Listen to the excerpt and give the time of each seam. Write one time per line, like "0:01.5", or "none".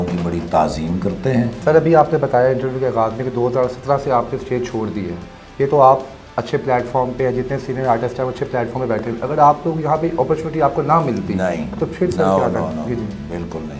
0:01.6